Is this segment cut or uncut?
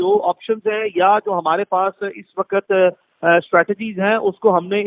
uncut